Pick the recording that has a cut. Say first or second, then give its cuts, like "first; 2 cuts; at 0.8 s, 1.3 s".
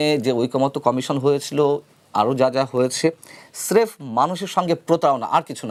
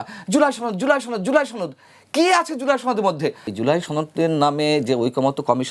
second; 1 cut; at 3.5 s